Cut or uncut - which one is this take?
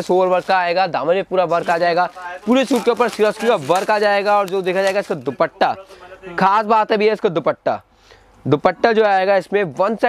uncut